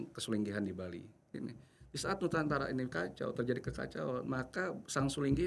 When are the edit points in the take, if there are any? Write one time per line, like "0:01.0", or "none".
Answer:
0:01.3